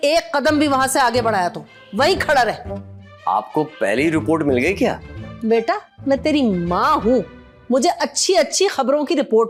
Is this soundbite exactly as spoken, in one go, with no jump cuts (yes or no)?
yes